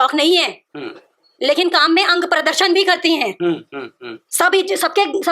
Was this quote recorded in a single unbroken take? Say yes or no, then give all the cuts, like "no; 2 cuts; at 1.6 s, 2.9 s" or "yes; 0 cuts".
yes; 0 cuts